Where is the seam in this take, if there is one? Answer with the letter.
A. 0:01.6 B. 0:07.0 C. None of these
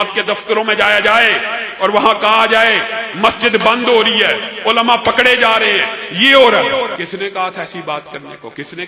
B